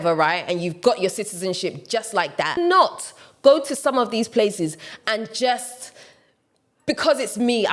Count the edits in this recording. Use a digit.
1